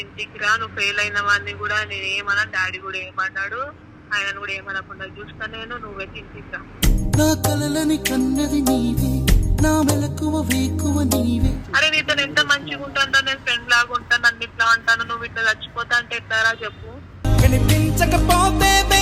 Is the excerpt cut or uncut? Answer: uncut